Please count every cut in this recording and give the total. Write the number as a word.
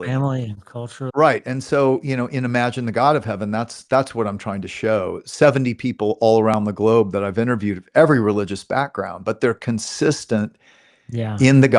one